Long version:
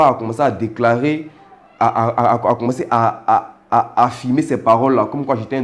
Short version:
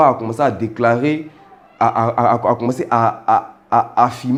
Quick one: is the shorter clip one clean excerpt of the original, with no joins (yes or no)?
yes